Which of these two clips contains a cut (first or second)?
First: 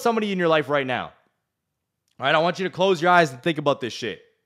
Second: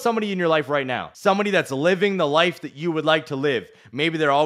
second